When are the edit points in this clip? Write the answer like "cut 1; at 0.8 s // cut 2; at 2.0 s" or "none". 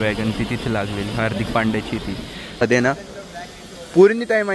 cut 1; at 2.6 s